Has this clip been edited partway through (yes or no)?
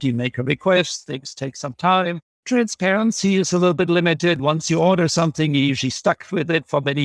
no